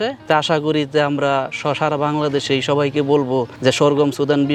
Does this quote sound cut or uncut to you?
uncut